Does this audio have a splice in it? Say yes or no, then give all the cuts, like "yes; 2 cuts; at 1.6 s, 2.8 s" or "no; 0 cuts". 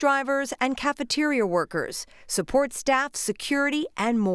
no; 0 cuts